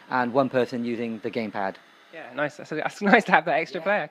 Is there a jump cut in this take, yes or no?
no